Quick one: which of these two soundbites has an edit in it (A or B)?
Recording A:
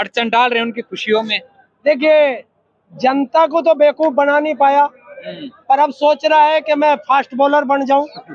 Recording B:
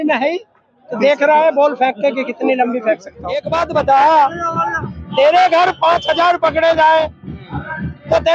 B